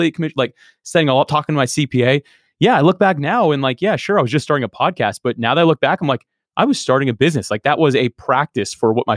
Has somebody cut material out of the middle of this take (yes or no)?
no